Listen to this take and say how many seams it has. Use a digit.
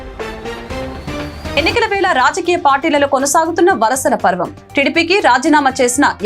1